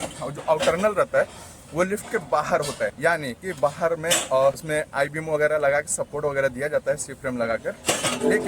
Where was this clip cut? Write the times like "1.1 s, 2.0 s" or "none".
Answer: 3.0 s, 4.6 s